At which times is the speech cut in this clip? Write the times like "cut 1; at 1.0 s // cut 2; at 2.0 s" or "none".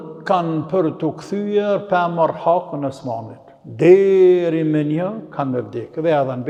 none